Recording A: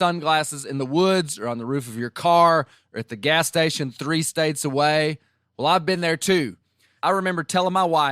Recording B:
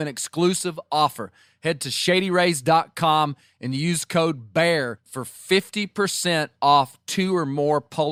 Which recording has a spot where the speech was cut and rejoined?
A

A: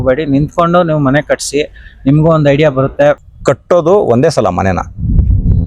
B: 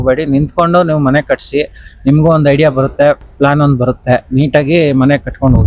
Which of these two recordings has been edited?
A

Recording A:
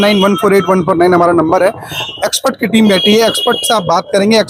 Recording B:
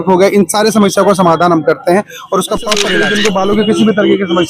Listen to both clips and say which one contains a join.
B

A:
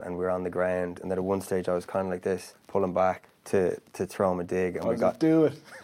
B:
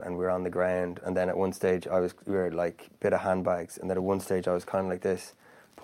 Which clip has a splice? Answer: A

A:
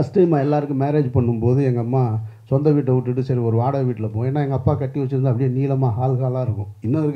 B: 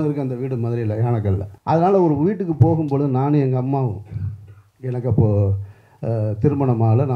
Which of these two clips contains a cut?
B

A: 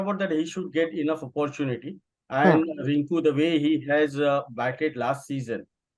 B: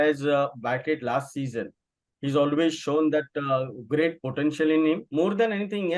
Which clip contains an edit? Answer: B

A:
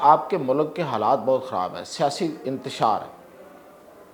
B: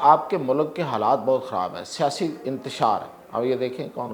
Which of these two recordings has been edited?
B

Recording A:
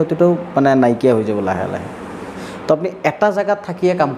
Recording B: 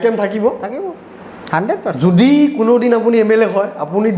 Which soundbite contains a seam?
A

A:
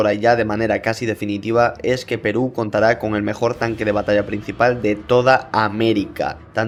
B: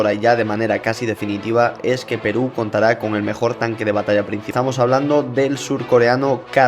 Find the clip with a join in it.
B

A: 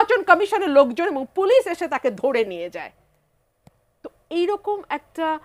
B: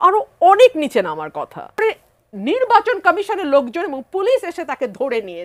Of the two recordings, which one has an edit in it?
B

